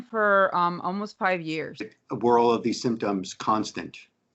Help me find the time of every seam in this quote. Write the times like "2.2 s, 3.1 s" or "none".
2.0 s

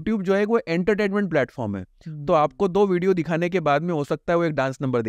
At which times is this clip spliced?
none

